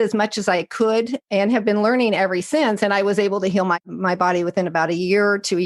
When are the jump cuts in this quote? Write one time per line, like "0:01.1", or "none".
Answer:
0:01.1
0:03.8